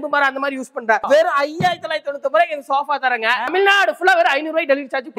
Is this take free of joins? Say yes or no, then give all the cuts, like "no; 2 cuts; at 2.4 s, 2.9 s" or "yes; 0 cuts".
no; 2 cuts; at 1.0 s, 3.5 s